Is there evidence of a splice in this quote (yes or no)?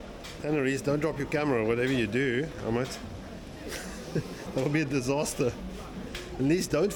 no